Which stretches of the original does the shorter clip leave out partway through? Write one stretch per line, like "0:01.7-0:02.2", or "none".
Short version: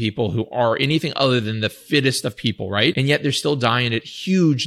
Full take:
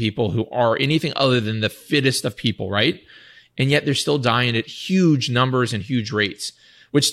0:03.0-0:03.6